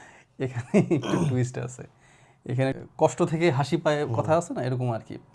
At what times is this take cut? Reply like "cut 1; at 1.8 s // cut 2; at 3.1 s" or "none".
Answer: cut 1; at 2.8 s